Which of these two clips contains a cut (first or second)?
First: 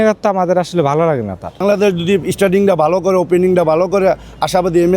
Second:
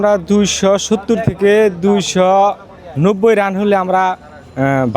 first